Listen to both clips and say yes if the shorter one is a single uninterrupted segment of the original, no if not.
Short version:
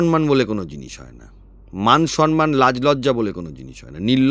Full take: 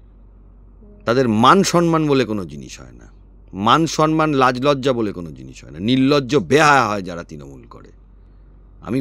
yes